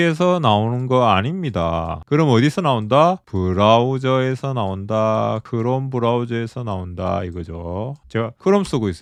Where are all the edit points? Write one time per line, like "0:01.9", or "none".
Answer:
none